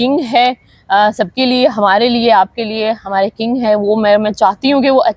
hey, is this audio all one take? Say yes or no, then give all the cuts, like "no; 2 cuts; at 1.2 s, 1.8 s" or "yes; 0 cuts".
yes; 0 cuts